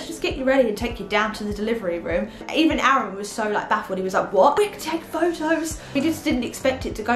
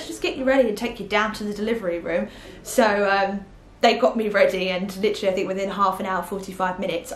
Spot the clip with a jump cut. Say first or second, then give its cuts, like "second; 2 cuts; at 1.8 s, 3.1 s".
first; 3 cuts; at 2.4 s, 4.6 s, 5.9 s